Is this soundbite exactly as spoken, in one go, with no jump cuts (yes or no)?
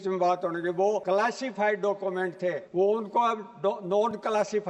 no